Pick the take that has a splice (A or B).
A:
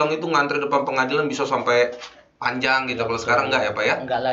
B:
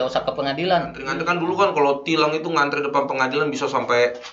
B